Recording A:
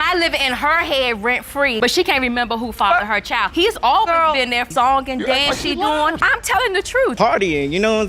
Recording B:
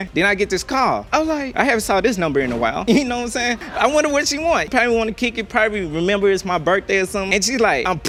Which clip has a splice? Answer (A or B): A